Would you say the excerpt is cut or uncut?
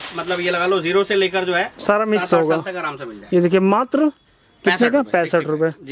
uncut